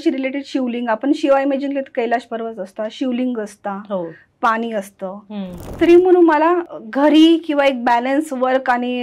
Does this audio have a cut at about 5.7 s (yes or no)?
yes